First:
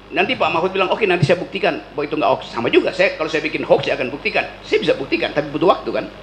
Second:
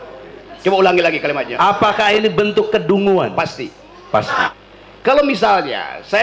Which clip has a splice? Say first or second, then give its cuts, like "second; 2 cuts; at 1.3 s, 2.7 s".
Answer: second; 1 cut; at 4.5 s